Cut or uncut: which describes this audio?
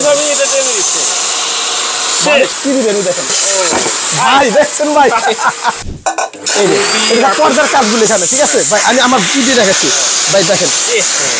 cut